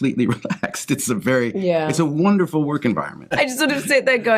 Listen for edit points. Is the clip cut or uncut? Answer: cut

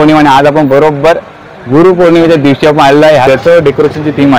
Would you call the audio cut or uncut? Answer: cut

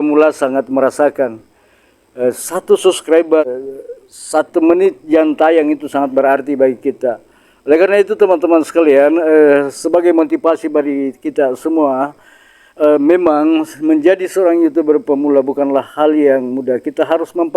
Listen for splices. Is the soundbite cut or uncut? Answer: cut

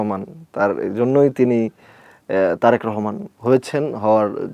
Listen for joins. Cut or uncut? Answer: uncut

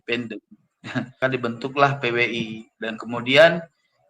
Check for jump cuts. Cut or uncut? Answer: cut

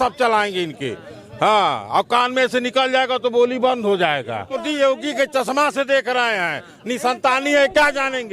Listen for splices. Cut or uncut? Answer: cut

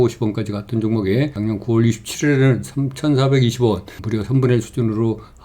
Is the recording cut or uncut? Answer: cut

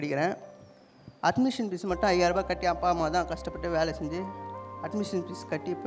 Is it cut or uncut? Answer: uncut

